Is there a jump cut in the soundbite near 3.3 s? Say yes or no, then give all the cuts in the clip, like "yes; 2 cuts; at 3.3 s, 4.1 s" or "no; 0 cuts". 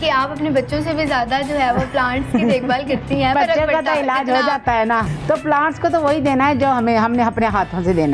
yes; 2 cuts; at 3.3 s, 5.1 s